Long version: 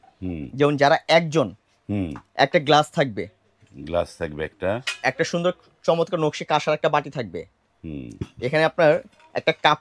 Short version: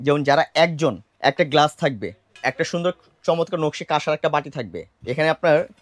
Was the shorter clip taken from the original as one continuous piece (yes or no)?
no